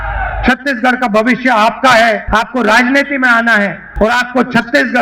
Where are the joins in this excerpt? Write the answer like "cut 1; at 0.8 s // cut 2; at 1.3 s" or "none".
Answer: cut 1; at 2.2 s // cut 2; at 3.8 s